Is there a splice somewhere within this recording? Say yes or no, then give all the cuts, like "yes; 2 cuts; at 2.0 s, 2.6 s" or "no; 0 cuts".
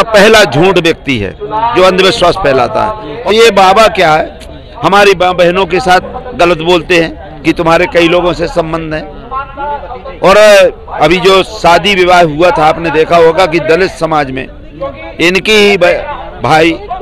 yes; 1 cut; at 3.1 s